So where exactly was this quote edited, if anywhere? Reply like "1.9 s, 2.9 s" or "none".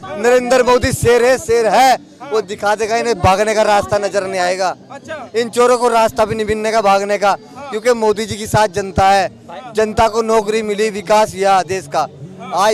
none